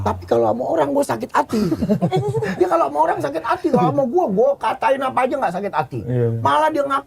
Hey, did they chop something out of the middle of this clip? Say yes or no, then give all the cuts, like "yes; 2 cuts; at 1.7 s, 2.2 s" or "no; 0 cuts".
no; 0 cuts